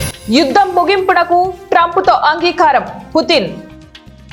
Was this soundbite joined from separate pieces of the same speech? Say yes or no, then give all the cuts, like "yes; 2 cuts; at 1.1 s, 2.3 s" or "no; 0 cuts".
no; 0 cuts